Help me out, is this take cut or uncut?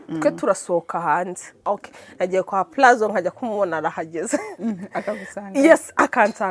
cut